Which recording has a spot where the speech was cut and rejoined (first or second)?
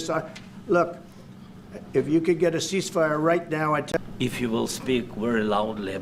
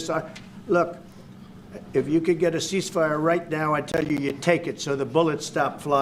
first